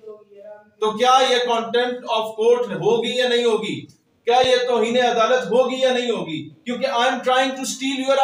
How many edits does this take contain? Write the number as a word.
zero